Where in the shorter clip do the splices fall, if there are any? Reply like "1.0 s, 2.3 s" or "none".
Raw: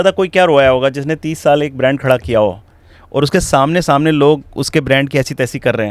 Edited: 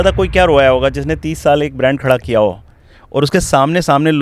none